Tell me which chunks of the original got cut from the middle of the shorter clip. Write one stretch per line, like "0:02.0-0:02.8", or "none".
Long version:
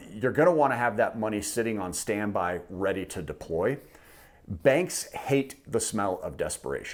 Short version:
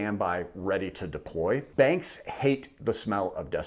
0:03.8-0:04.5

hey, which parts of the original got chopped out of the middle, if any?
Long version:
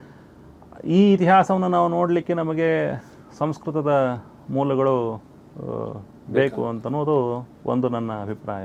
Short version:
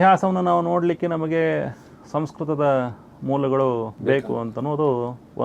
0:05.2-0:06.2

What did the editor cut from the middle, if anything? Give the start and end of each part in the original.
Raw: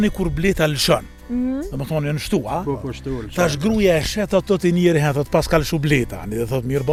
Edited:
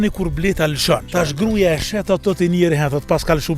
0:01.1-0:03.3

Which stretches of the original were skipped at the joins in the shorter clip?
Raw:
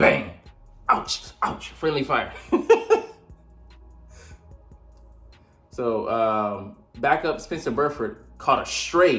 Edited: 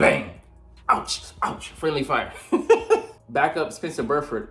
0:03.2-0:06.8

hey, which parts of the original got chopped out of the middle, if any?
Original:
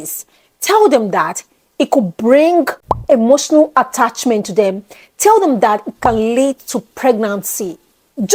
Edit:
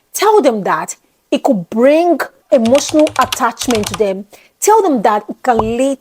0:02.8-0:02.9

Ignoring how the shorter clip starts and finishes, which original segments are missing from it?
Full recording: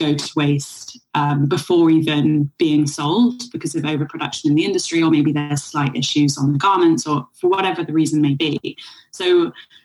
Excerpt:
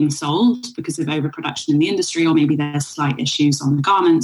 none

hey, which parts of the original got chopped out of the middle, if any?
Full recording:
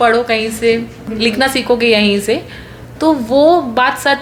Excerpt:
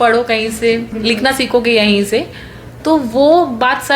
0:00.9-0:01.1

